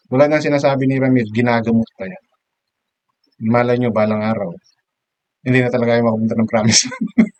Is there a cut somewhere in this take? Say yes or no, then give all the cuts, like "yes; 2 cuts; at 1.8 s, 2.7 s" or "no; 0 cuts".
no; 0 cuts